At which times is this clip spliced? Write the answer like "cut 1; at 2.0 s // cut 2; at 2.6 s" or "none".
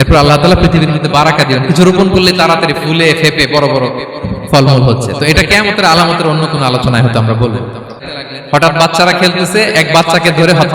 cut 1; at 8.0 s